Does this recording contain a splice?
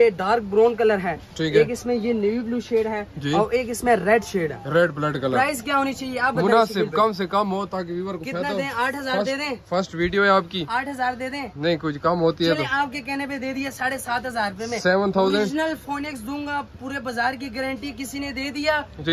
no; 0 cuts

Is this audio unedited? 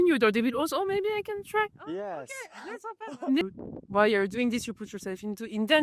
no; 1 cut; at 3.5 s

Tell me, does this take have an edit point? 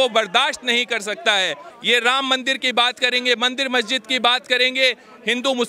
yes; 1 cut; at 1.7 s

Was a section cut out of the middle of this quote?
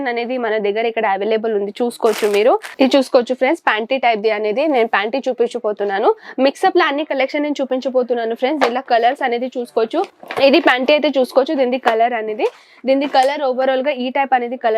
yes; 2 cuts; at 2.7 s, 10.2 s

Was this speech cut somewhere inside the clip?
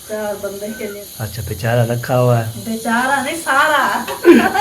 yes; 1 cut; at 1.0 s

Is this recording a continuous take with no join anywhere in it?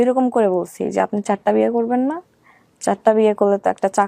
yes; 0 cuts

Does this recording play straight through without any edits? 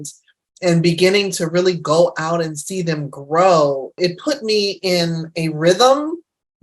no; 1 cut; at 4.0 s

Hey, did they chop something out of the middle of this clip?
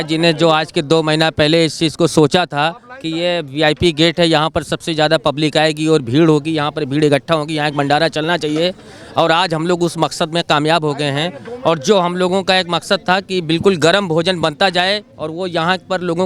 no; 0 cuts

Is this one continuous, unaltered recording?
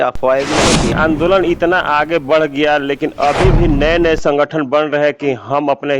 no; 1 cut; at 0.9 s

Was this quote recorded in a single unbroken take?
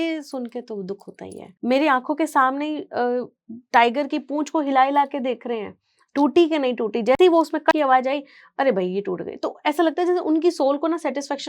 no; 1 cut; at 1.5 s

